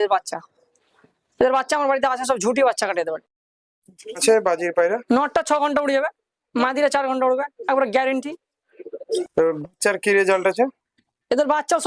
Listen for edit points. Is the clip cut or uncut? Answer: cut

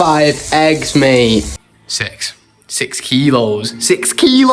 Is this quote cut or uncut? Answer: cut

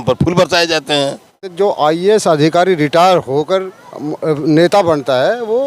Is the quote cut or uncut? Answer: cut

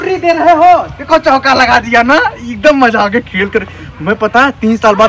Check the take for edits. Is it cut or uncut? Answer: uncut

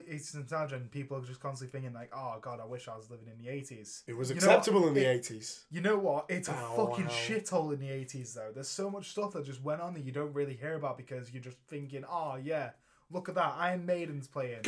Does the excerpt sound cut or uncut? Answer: cut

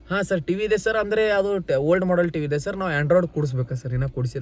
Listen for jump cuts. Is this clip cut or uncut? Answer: uncut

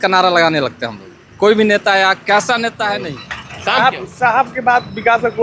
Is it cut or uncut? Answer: cut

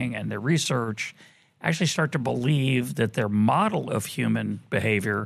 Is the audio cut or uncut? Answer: uncut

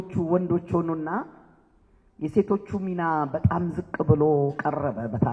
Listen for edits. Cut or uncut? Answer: uncut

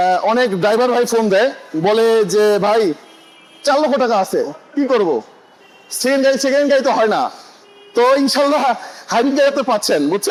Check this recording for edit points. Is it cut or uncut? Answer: uncut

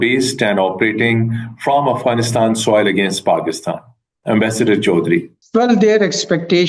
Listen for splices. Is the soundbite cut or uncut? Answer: uncut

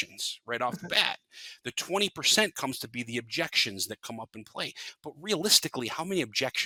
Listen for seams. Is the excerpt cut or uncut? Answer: uncut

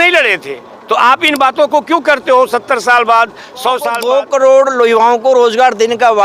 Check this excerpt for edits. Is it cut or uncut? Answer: cut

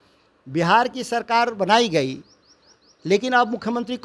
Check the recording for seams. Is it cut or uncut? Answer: uncut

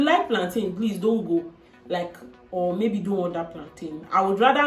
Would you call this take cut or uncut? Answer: uncut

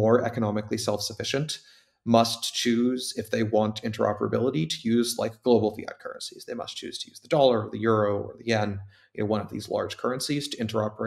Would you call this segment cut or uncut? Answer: uncut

